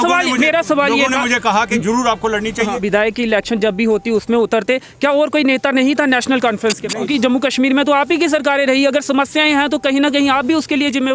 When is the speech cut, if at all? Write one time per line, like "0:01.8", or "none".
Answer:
0:02.8
0:07.1